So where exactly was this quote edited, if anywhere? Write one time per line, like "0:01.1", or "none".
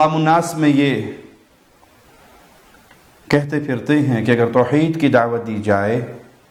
none